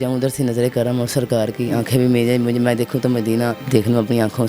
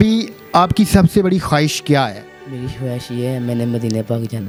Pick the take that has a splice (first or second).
first